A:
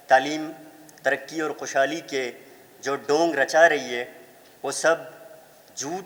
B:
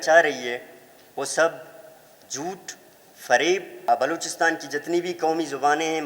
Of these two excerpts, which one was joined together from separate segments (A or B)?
B